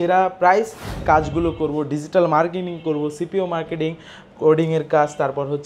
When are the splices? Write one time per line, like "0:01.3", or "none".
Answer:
0:01.0